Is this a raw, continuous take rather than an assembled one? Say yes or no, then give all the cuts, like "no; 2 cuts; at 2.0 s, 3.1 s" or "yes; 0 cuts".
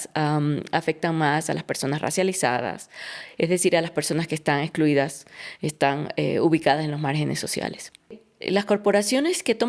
no; 1 cut; at 8.3 s